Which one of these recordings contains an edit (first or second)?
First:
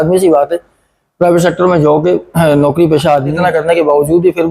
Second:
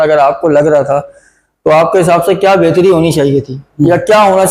first